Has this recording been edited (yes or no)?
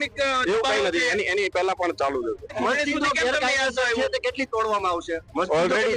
yes